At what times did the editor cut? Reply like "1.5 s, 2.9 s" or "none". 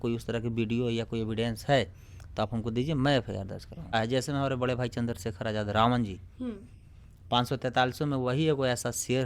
3.9 s